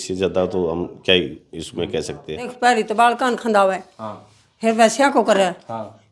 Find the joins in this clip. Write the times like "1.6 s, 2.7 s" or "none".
2.5 s